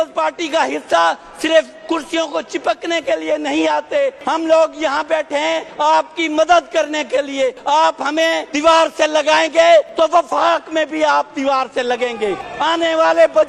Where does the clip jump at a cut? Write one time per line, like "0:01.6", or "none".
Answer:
0:04.2
0:05.7
0:07.6
0:08.5
0:09.9
0:12.5